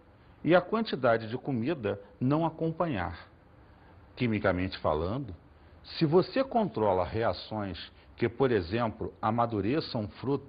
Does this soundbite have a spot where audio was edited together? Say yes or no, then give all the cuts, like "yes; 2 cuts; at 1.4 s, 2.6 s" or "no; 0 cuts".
yes; 1 cut; at 7.6 s